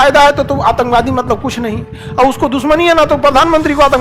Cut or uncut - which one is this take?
uncut